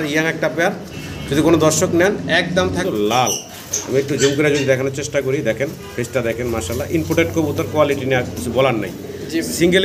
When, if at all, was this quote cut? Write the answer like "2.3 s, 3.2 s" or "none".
2.8 s